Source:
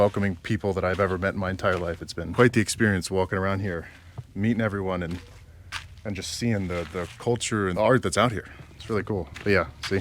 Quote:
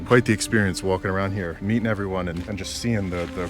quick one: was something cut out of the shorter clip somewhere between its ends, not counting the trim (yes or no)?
yes